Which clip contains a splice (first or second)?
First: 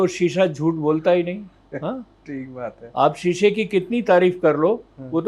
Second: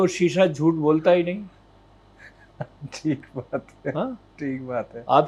first